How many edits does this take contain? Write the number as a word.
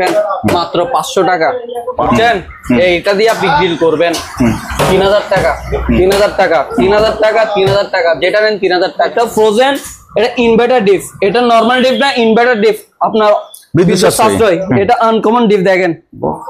two